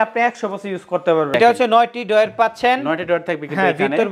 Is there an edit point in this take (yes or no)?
yes